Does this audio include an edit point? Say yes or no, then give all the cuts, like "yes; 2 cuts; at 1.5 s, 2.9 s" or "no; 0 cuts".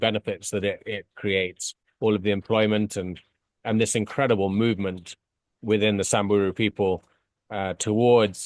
no; 0 cuts